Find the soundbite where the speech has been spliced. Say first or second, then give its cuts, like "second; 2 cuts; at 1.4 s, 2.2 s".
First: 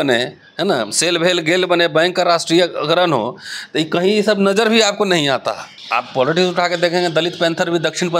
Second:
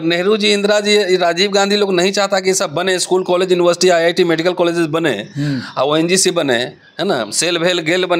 first; 1 cut; at 5.7 s